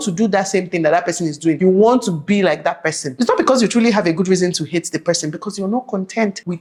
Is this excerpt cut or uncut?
uncut